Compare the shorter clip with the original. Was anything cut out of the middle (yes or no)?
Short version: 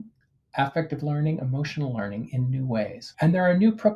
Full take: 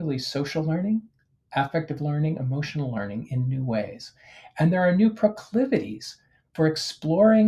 yes